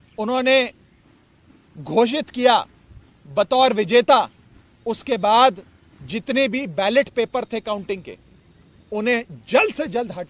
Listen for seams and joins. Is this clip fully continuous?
yes; 0 cuts

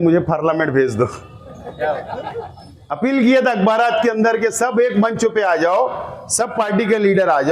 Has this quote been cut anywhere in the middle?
no; 0 cuts

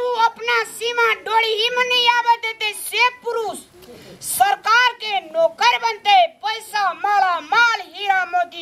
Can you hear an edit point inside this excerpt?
no; 0 cuts

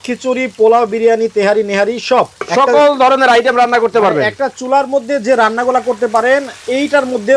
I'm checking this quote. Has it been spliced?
no; 0 cuts

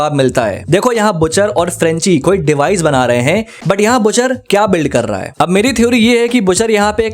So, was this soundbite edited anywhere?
yes; 2 cuts; at 3.6 s, 5.3 s

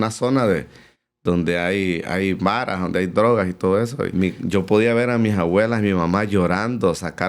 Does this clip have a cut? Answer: yes; 1 cut; at 4.0 s

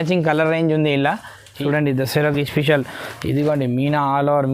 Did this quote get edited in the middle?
yes; 1 cut; at 1.5 s

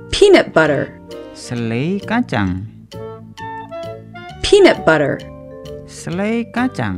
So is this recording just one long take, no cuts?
no; 1 cut; at 1.5 s

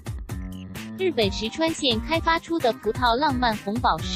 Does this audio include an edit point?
yes; 1 cut; at 1.0 s

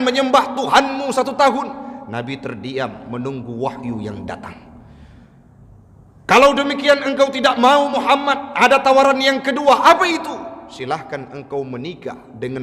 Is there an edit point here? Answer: no; 0 cuts

